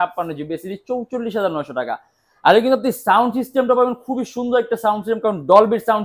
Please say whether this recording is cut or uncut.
uncut